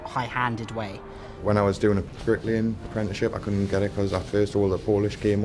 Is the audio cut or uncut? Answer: cut